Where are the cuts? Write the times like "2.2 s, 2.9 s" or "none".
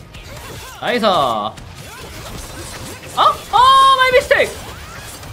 none